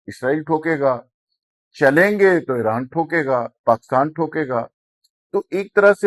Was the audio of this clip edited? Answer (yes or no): no